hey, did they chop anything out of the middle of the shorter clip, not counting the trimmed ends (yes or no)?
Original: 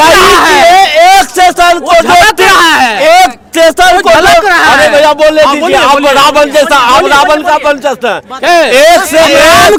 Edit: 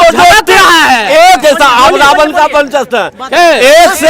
yes